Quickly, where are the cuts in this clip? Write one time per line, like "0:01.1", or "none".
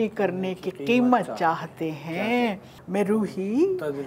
0:02.7